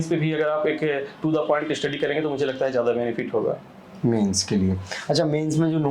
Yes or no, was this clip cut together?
no